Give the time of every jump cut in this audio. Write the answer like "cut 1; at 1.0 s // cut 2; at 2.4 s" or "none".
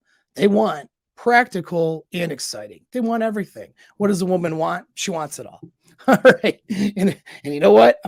none